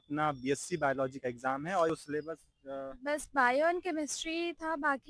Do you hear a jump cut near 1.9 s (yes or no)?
yes